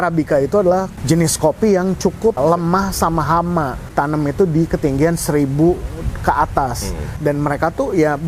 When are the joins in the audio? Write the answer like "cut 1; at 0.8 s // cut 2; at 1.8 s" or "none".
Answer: cut 1; at 0.9 s // cut 2; at 2.4 s // cut 3; at 3.9 s // cut 4; at 7.2 s